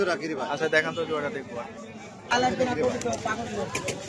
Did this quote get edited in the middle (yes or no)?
yes